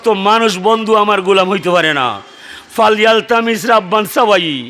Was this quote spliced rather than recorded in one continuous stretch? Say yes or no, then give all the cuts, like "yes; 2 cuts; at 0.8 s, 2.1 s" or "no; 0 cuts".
no; 0 cuts